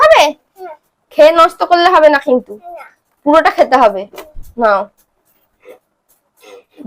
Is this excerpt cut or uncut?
uncut